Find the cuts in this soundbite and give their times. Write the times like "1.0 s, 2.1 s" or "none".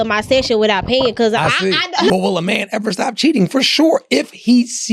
2.1 s

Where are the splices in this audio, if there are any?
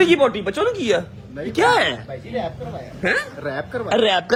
none

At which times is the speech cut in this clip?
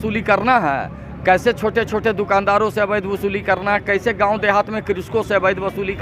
none

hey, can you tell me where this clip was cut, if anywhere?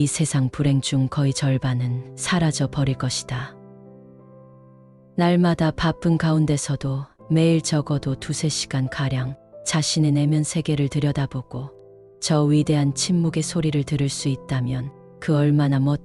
3.5 s, 5.1 s

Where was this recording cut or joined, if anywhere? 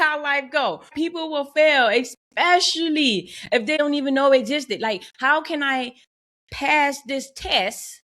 0.9 s, 3.8 s

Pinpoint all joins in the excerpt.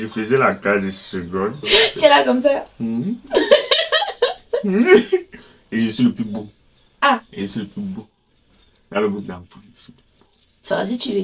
1.9 s

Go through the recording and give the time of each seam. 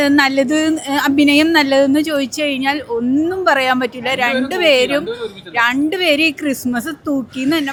none

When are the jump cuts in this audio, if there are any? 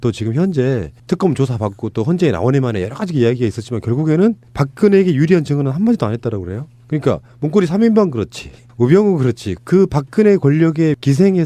1.6 s

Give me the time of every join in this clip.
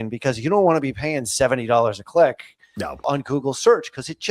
3.1 s

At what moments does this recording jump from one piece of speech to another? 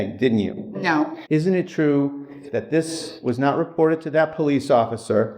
1.2 s

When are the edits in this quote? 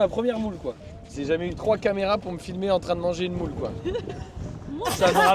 1.1 s, 3.8 s

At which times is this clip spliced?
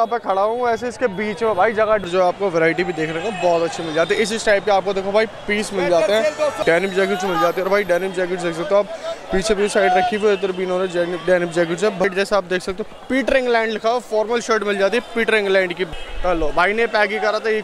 2.1 s, 6.6 s, 12.0 s, 15.8 s

